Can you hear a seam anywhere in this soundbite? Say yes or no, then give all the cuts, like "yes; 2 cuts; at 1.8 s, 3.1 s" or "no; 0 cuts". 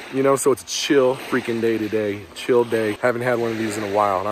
yes; 1 cut; at 2.9 s